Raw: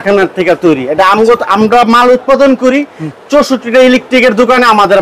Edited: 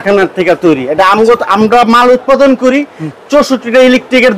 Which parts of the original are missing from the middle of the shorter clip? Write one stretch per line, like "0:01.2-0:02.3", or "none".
none